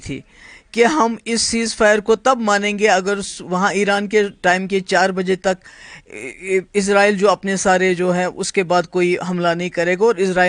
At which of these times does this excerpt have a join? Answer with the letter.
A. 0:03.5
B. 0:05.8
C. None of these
C